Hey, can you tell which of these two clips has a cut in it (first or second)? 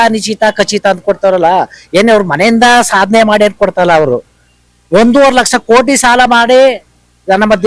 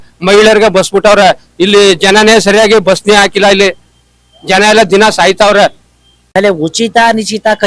second